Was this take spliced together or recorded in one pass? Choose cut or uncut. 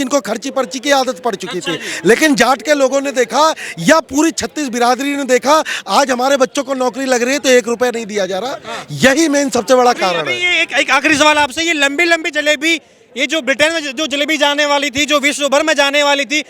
uncut